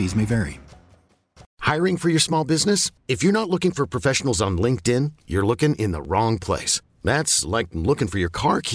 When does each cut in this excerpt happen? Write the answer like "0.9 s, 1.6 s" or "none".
1.4 s